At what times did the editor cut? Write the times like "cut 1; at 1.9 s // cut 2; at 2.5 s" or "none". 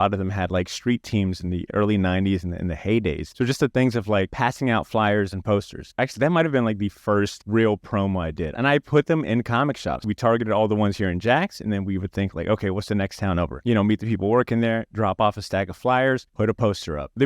cut 1; at 1.7 s // cut 2; at 5.9 s // cut 3; at 8.5 s // cut 4; at 9.9 s // cut 5; at 13.6 s